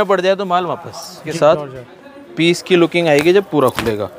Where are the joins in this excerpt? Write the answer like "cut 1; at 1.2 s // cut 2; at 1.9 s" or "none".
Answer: cut 1; at 1.3 s